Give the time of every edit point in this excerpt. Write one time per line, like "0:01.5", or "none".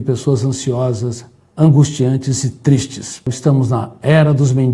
0:03.3